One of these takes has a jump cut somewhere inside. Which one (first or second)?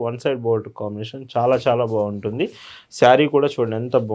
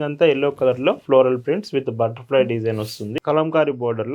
second